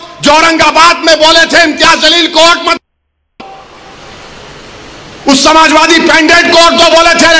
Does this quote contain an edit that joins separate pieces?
no; 0 cuts

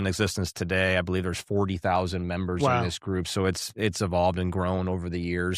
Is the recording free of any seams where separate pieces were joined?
yes; 0 cuts

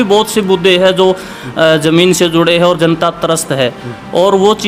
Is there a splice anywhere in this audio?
no; 0 cuts

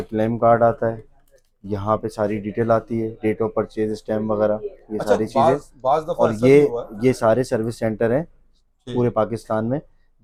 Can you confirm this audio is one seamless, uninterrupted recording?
yes; 0 cuts

